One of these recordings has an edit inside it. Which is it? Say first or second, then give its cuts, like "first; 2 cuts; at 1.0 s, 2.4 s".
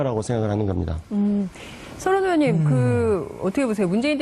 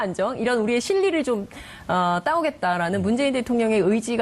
first; 1 cut; at 1.1 s